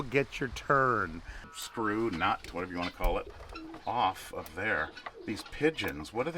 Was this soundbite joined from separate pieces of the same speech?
yes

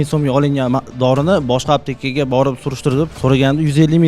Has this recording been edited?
yes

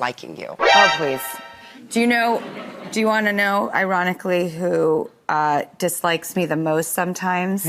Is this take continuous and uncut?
yes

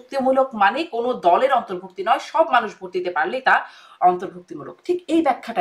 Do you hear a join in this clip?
no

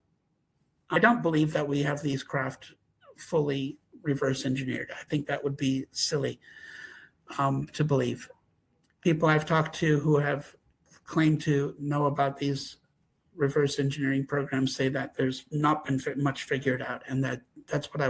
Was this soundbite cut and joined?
yes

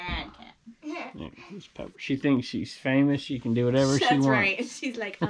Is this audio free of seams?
yes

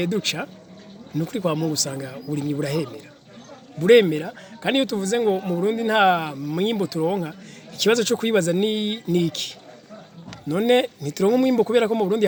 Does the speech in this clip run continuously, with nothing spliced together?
yes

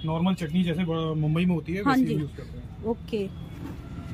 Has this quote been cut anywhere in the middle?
no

